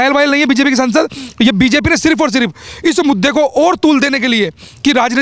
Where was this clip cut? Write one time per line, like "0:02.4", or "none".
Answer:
none